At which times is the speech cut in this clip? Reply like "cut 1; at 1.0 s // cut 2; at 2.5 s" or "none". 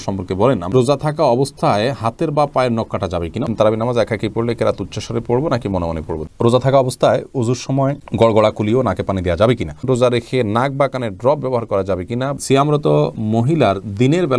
cut 1; at 0.7 s // cut 2; at 3.5 s // cut 3; at 6.2 s // cut 4; at 9.8 s // cut 5; at 12.4 s